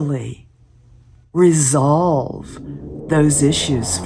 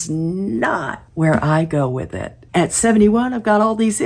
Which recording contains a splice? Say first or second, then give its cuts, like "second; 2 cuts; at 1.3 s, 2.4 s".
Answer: second; 2 cuts; at 1.0 s, 2.4 s